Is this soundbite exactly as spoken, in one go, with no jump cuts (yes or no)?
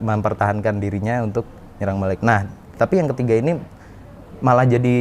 yes